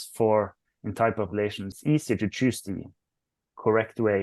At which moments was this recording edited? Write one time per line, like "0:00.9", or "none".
0:01.8